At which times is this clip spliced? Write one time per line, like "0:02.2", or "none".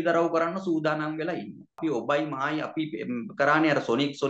0:01.8